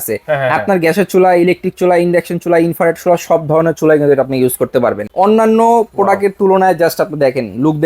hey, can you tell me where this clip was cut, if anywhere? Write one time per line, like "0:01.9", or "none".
0:05.0